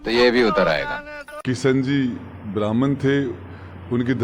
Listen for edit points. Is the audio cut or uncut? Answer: cut